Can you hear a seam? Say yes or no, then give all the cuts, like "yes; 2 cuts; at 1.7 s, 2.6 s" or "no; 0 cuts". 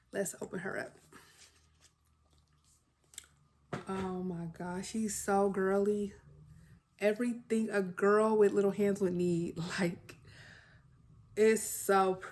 no; 0 cuts